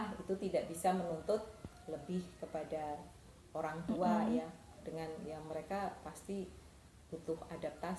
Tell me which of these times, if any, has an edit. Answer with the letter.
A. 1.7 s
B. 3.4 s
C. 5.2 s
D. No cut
D